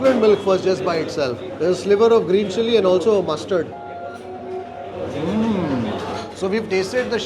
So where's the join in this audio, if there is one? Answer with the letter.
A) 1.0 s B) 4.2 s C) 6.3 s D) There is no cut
C